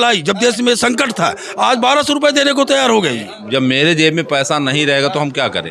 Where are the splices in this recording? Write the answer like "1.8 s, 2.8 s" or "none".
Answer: 3.3 s